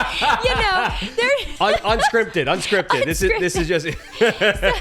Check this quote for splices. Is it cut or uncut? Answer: uncut